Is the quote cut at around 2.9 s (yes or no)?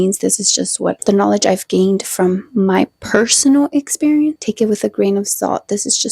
no